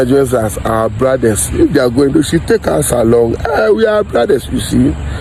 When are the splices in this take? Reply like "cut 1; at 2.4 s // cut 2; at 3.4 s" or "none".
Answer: none